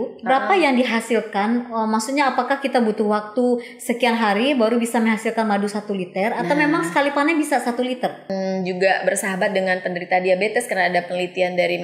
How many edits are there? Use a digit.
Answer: 1